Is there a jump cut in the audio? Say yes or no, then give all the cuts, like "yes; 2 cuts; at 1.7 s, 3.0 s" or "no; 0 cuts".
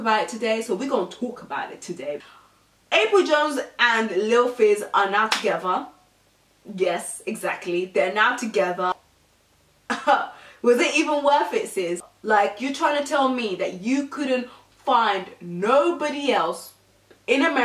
yes; 2 cuts; at 2.2 s, 11.9 s